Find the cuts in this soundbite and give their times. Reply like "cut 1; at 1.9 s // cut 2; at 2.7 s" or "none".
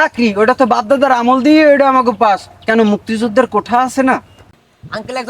cut 1; at 4.4 s